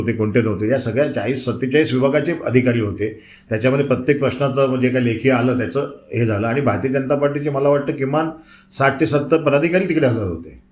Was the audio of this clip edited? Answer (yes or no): no